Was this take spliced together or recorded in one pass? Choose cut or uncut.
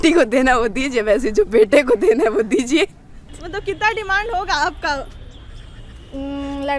cut